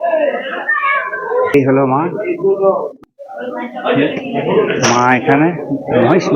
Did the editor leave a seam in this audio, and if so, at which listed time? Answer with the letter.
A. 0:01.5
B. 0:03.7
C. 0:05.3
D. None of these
A